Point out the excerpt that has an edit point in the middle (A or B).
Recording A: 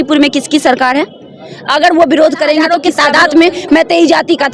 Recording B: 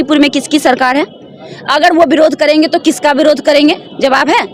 A